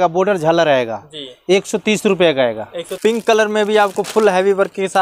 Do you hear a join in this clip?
yes; 1 cut; at 2.8 s

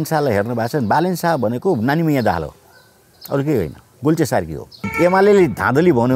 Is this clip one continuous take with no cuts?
no; 3 cuts; at 3.1 s, 3.8 s, 4.9 s

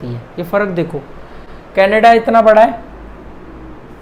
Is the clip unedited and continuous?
yes; 0 cuts

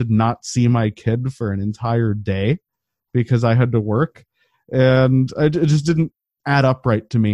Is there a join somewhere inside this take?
no; 0 cuts

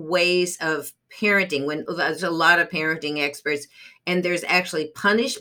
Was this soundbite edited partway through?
no; 0 cuts

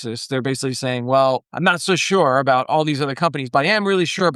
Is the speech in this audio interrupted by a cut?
yes; 1 cut; at 1.5 s

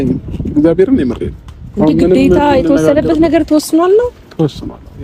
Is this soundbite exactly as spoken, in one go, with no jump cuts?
yes; 0 cuts

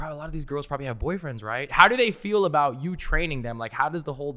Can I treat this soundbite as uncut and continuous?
yes; 0 cuts

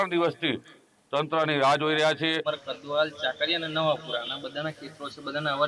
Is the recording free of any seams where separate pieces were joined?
no; 1 cut; at 2.4 s

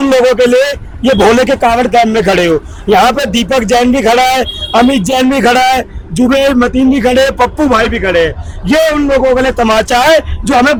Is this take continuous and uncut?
yes; 0 cuts

